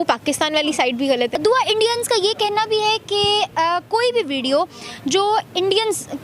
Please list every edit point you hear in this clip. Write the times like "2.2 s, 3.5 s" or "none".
1.4 s